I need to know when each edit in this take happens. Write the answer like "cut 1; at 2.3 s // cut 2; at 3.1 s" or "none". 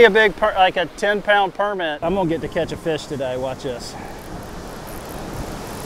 cut 1; at 2.0 s